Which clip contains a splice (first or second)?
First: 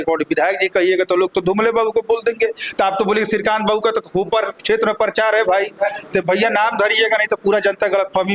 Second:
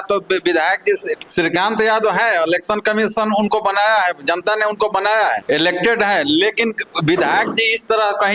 second